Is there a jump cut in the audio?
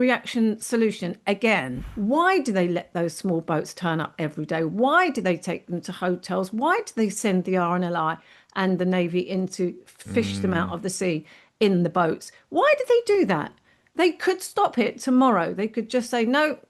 yes; 1 cut; at 1.8 s

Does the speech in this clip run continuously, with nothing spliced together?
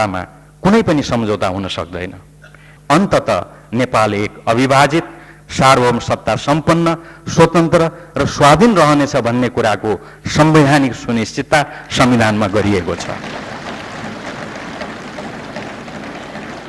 no; 1 cut; at 2.7 s

